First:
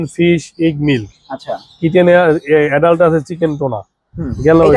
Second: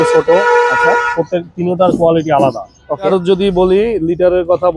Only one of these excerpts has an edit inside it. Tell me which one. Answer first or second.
second